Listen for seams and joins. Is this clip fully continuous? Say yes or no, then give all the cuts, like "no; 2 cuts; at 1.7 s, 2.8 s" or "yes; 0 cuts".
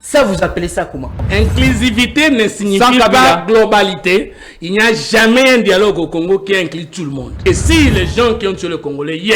no; 2 cuts; at 1.2 s, 7.4 s